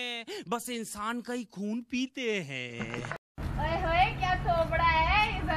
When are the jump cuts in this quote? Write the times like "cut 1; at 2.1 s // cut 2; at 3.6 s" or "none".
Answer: cut 1; at 3.3 s